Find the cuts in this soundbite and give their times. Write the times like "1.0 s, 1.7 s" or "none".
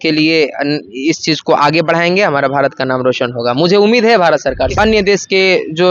4.7 s